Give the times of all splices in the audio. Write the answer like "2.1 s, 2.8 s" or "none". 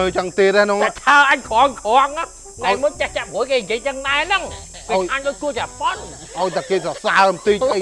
none